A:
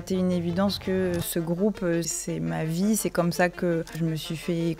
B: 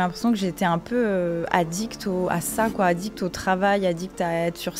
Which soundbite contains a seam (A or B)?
A